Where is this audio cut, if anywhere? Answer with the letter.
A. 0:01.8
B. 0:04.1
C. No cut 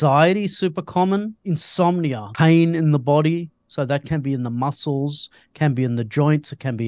A